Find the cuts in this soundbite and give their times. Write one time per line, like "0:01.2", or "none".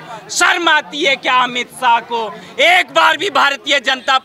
none